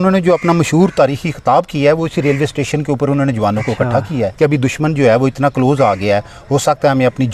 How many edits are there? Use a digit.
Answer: 1